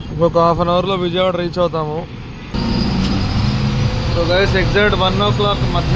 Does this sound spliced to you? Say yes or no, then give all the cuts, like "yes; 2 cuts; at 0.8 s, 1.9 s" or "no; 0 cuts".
yes; 1 cut; at 2.5 s